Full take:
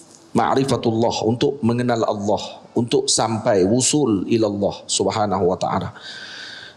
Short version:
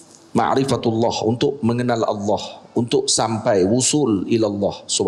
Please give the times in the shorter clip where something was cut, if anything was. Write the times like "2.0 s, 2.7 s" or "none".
none